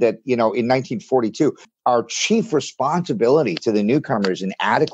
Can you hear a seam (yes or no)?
yes